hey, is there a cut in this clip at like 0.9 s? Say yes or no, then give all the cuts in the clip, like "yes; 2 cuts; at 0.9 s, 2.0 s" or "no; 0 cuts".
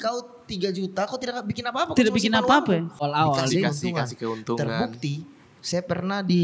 no; 1 cut; at 3.1 s